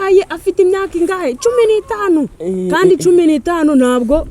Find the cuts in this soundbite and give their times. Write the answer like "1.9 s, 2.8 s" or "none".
none

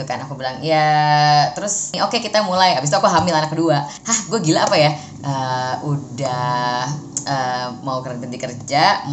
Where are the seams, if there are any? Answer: 2.0 s, 4.0 s

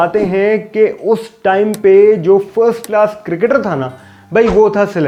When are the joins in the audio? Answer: none

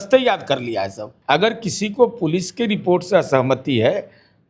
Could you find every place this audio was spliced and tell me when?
1.1 s

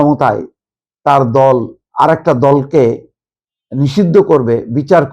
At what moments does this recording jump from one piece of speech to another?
1.8 s

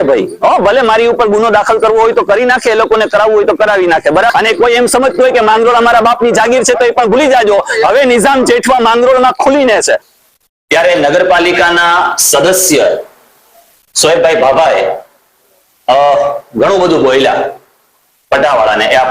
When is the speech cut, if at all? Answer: 4.3 s, 10.1 s

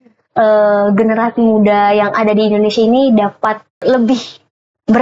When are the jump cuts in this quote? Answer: 3.8 s

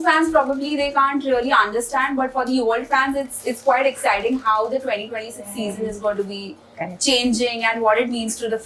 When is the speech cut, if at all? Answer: none

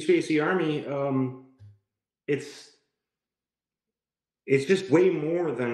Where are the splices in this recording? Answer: none

